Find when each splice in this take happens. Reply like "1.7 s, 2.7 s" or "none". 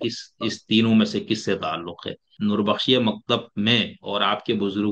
2.3 s